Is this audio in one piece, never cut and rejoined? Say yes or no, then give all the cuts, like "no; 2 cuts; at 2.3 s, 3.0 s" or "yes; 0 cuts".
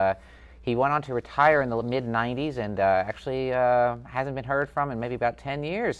no; 1 cut; at 3.3 s